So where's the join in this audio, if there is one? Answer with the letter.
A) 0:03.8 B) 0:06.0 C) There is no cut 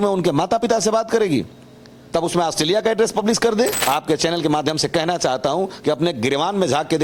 A